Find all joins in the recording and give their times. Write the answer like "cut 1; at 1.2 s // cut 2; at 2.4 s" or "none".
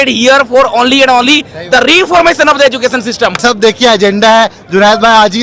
cut 1; at 3.4 s